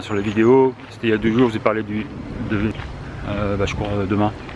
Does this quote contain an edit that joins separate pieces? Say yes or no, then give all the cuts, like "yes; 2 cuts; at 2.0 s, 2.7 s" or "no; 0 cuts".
yes; 1 cut; at 2.7 s